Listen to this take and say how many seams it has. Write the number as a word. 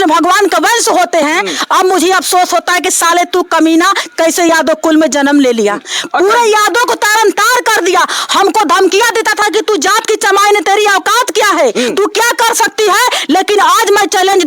zero